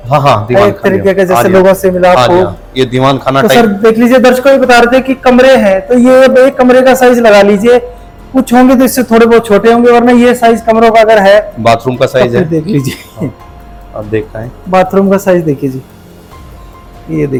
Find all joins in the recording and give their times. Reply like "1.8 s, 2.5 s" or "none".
none